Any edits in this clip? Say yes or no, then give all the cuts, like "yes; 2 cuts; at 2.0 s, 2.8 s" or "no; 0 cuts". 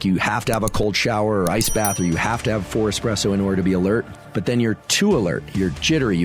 yes; 1 cut; at 4.2 s